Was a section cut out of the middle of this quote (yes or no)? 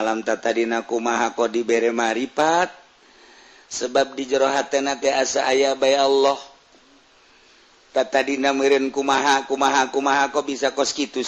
no